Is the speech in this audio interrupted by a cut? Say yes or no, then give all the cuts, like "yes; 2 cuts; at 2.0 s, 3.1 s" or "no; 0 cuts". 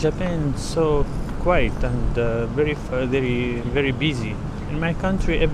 no; 0 cuts